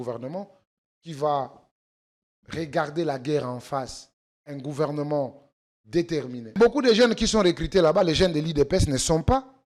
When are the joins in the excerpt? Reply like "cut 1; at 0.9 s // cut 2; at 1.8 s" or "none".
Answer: cut 1; at 6.6 s